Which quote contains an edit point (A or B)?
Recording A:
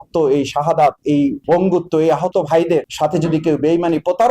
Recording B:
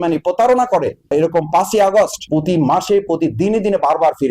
A